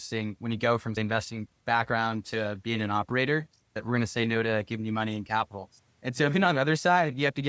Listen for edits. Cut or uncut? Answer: cut